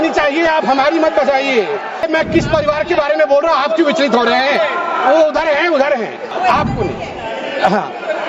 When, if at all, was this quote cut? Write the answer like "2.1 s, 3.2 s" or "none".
2.1 s, 6.3 s